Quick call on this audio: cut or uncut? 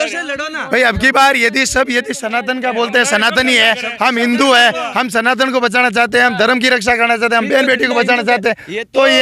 uncut